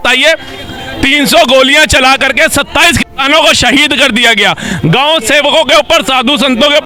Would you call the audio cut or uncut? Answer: uncut